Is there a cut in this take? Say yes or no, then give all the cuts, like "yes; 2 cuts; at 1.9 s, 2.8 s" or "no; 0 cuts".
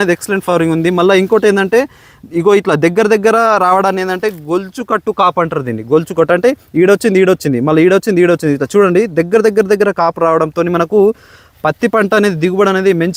no; 0 cuts